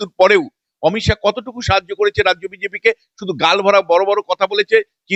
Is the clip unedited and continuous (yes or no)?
yes